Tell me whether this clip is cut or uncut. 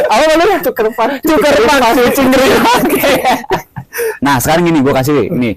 cut